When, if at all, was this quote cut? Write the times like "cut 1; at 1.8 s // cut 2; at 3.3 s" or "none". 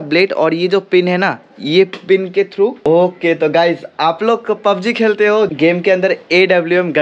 cut 1; at 2.8 s // cut 2; at 5.5 s